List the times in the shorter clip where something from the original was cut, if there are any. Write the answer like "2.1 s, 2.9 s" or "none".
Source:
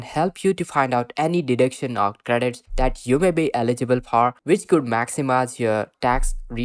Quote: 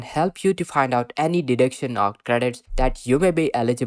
none